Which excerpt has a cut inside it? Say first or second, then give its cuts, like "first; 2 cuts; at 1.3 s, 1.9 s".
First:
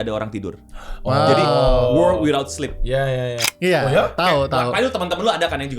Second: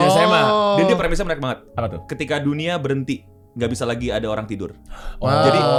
first; 1 cut; at 3.4 s